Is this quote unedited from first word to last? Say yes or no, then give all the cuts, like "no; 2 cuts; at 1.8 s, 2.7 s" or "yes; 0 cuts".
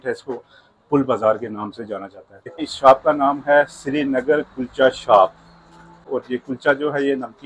no; 2 cuts; at 2.7 s, 6.1 s